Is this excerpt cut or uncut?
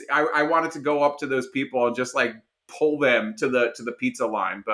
uncut